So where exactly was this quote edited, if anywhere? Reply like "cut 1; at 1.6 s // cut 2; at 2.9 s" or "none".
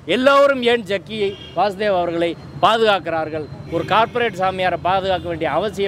none